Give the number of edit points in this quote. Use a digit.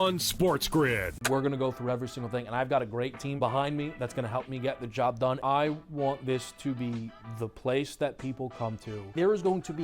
1